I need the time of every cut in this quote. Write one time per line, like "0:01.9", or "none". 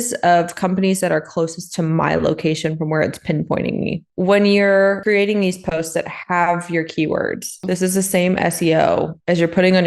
0:04.1
0:05.0
0:07.6

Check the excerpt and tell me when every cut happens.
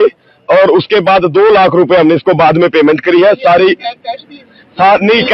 none

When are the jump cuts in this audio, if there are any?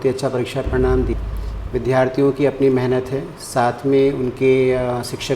0:01.1

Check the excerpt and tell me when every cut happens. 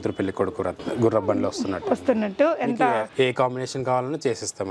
none

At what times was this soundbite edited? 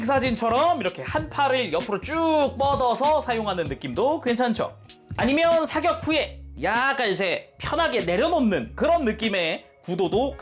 none

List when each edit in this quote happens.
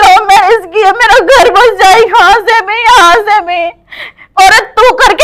0:04.2

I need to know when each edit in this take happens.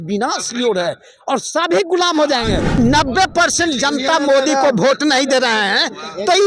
0:02.7

